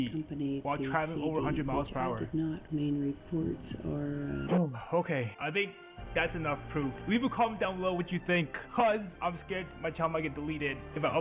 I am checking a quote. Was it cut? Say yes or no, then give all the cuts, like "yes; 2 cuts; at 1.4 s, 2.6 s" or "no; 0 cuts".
yes; 1 cut; at 4.5 s